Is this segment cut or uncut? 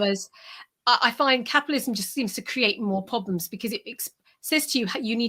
uncut